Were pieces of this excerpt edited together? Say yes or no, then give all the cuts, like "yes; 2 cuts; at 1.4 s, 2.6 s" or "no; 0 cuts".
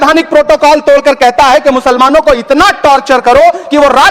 no; 0 cuts